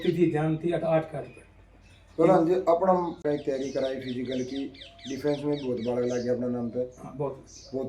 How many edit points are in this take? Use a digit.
1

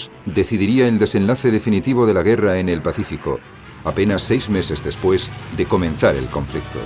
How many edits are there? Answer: 1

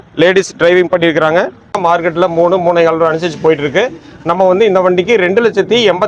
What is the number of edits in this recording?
1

